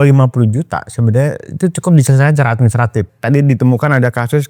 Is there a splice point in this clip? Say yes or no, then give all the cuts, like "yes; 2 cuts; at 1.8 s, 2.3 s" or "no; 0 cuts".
yes; 1 cut; at 3.1 s